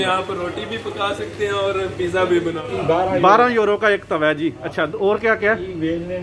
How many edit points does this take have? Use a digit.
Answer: 1